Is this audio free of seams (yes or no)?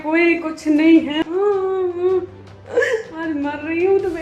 no